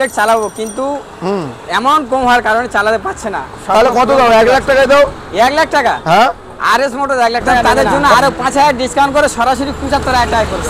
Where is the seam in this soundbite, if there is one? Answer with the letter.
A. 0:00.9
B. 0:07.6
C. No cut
B